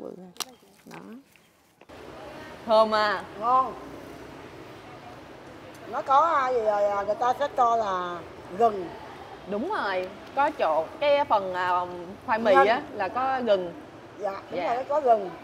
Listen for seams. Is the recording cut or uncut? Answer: cut